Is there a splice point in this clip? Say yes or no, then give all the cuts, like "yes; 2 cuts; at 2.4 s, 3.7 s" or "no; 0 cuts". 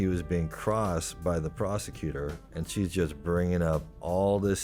no; 0 cuts